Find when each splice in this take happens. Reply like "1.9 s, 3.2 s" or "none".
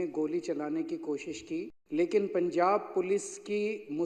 1.8 s